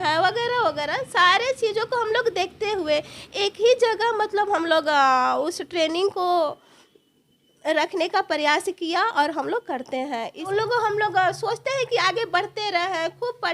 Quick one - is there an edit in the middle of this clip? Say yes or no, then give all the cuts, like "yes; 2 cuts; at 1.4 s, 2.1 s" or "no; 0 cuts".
yes; 1 cut; at 10.5 s